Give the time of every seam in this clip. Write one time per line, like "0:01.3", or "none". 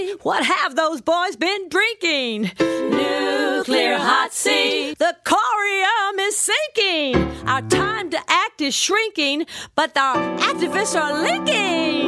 none